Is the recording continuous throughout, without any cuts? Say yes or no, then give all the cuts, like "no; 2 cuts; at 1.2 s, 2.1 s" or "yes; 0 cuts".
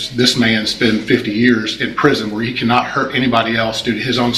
yes; 0 cuts